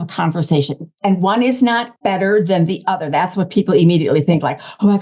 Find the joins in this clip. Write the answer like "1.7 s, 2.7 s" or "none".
1.9 s

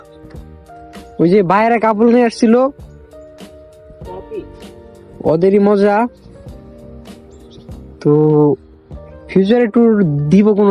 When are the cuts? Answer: 6.2 s, 8.0 s

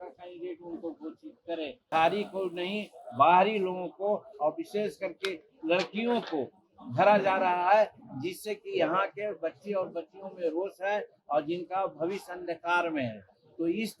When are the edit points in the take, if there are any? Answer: 1.9 s

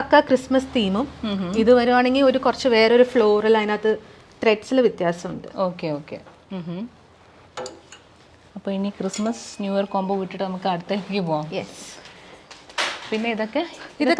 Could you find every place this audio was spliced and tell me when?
none

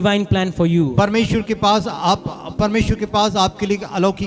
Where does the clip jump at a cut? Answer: none

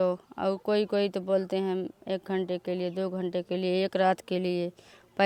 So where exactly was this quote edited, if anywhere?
none

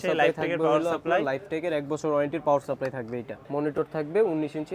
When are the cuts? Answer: 3.3 s

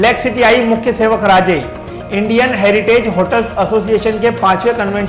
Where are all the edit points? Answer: none

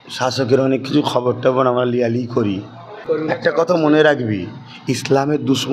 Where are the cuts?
3.0 s

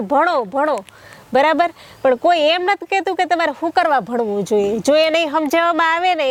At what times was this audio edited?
none

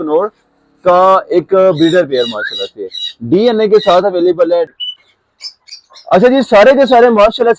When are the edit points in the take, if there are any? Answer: 4.7 s

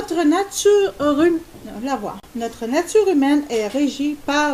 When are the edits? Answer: none

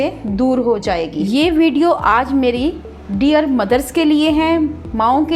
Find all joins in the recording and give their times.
1.2 s

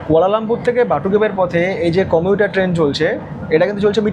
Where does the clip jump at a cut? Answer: none

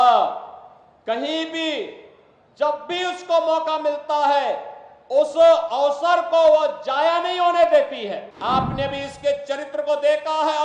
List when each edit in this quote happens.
8.3 s

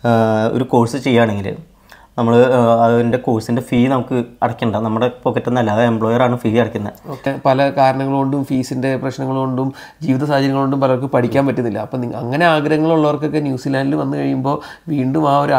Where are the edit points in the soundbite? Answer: 7.3 s

